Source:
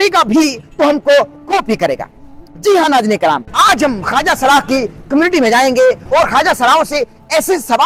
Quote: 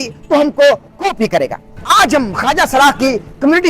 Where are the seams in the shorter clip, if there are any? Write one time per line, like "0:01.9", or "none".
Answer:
0:01.8

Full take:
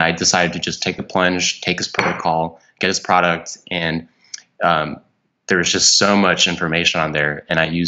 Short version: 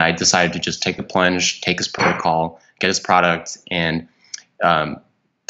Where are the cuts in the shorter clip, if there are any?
none

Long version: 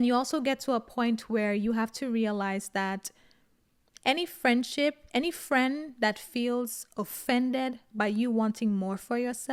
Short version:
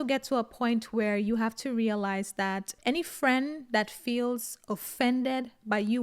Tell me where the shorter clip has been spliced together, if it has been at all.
0:02.7

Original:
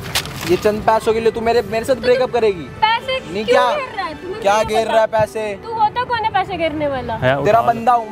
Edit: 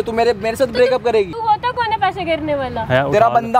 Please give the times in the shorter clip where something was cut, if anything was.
0:01.4

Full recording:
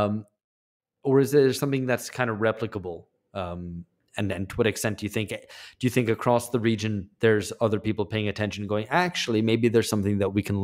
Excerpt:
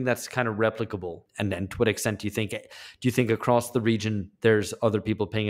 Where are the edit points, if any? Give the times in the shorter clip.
0:01.2

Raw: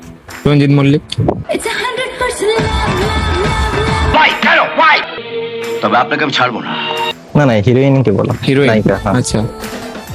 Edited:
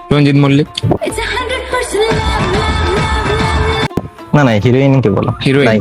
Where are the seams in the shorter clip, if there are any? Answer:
0:00.9
0:03.6

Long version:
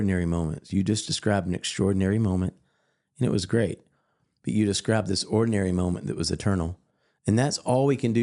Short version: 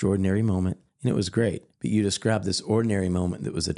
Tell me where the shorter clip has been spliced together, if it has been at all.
0:00.9
0:01.7

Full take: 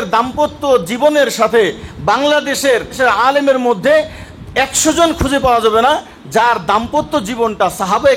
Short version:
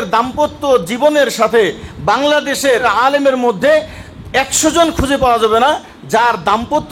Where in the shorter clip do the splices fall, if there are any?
0:02.8

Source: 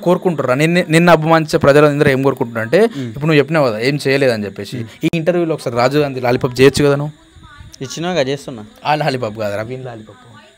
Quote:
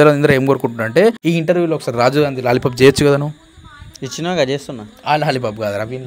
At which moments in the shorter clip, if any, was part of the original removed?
0:01.2

